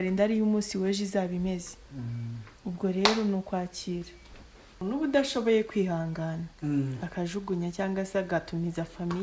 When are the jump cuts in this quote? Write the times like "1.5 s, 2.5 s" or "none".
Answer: 4.8 s

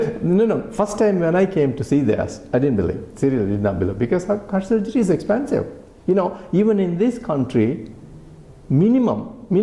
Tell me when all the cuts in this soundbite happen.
none

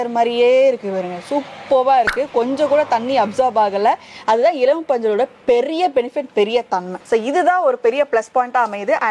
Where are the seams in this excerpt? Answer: none

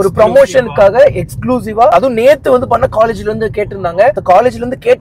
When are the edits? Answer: 1.9 s

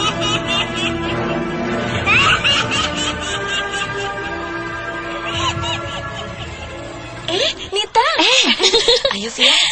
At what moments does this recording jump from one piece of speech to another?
7.2 s

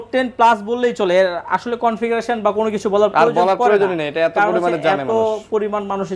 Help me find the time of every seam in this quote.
none

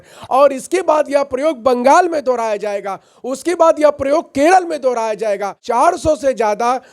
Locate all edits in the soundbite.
5.6 s

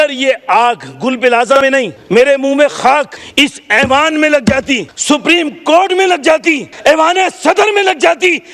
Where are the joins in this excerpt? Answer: 2.0 s, 3.2 s, 4.9 s, 6.7 s

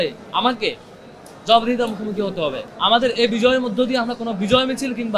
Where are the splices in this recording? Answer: 2.7 s

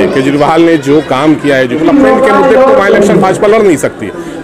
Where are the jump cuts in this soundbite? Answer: 1.8 s

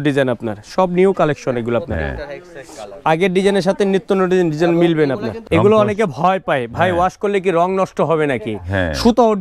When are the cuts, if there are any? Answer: 5.3 s

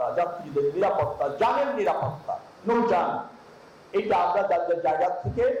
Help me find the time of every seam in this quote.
none

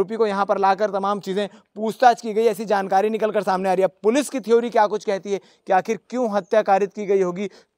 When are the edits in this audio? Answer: none

